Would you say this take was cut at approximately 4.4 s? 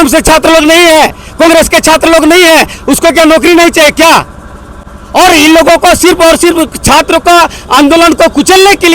no; 0 cuts

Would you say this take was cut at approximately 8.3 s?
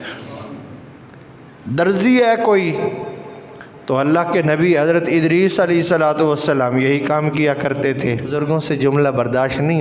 yes; 1 cut; at 8.3 s

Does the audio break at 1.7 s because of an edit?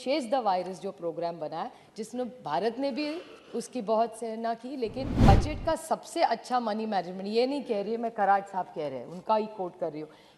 no; 1 cut; at 5.3 s

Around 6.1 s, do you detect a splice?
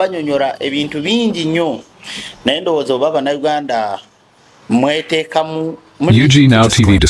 yes; 1 cut; at 6.1 s

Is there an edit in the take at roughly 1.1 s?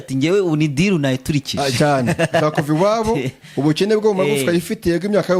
no; 0 cuts

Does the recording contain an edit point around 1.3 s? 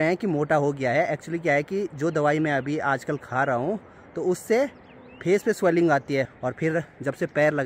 no; 0 cuts

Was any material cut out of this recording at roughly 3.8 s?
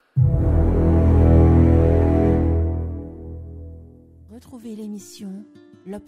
yes; 1 cut; at 3.8 s

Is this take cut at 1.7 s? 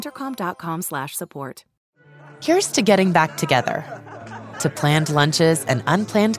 yes; 1 cut; at 1.7 s

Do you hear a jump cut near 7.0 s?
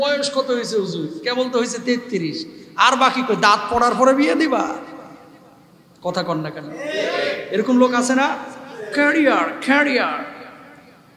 no; 0 cuts

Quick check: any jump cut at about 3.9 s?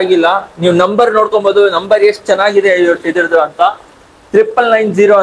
no; 0 cuts

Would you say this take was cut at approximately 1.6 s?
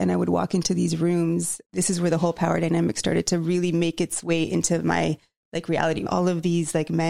yes; 2 cuts; at 1.6 s, 6.1 s

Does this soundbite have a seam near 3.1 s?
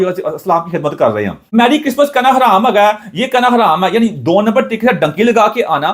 no; 1 cut; at 1.4 s

